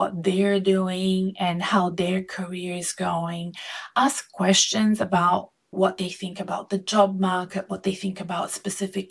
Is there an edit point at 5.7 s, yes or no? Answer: yes